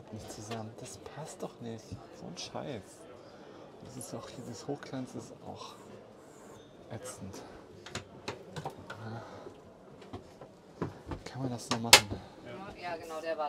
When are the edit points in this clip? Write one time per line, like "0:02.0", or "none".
none